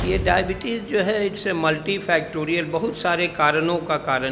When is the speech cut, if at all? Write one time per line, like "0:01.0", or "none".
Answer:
none